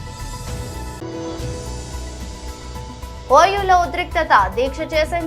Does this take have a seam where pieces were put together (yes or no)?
yes